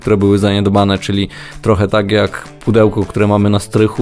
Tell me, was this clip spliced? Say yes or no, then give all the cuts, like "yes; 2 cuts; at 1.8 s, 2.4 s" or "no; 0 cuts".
no; 0 cuts